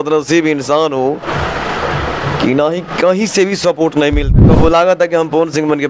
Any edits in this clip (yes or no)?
yes